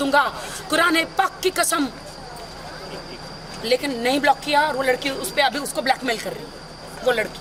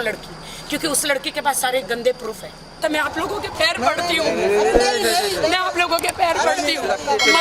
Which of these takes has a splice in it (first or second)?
second